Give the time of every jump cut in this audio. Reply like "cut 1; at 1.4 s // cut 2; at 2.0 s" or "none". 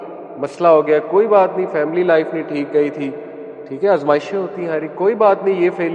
none